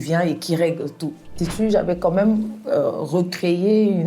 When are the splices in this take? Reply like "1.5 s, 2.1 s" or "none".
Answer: 1.4 s